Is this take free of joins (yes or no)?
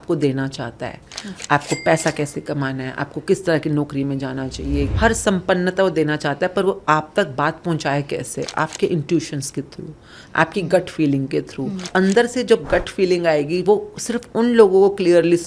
no